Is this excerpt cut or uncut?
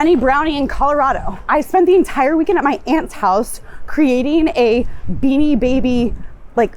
cut